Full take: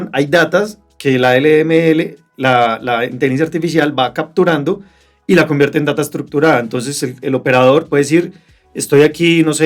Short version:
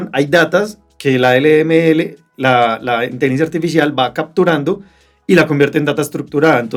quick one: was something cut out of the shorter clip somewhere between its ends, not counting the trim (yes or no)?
no